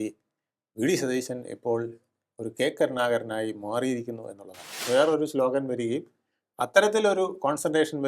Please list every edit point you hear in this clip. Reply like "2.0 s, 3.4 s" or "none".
4.8 s